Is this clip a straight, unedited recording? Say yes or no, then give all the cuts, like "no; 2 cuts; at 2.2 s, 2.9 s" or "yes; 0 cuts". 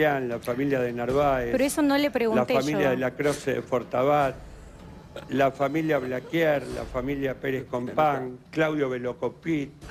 yes; 0 cuts